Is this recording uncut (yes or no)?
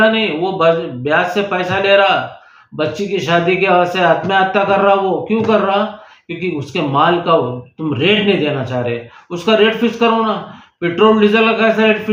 yes